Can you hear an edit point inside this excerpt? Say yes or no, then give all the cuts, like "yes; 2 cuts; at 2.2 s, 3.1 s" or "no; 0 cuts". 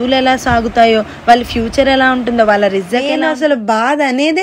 yes; 1 cut; at 3.0 s